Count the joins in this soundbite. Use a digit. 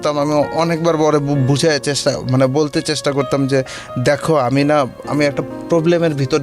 0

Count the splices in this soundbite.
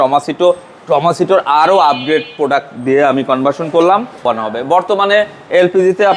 1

